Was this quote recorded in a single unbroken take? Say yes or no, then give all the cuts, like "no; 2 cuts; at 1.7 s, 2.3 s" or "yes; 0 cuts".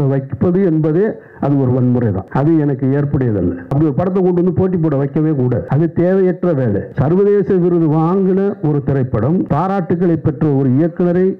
no; 5 cuts; at 2.2 s, 3.6 s, 5.7 s, 6.9 s, 9.5 s